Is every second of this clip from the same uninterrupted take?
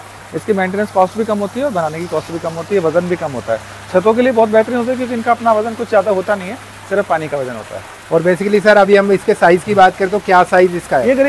yes; 0 cuts

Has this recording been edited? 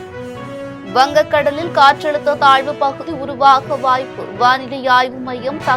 yes; 1 cut; at 0.9 s

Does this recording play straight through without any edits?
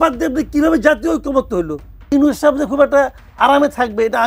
no; 1 cut; at 2.1 s

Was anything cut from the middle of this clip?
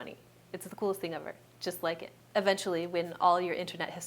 yes; 1 cut; at 2.1 s

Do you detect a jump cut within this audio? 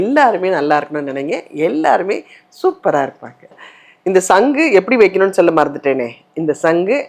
no; 0 cuts

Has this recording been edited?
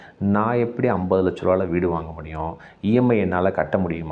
no; 0 cuts

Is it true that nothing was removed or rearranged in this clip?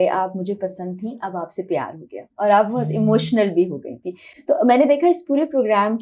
yes; 0 cuts

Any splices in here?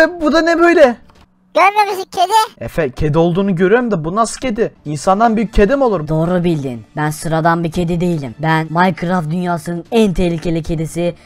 yes; 6 cuts; at 1.2 s, 2.6 s, 4.9 s, 6.0 s, 6.8 s, 8.7 s

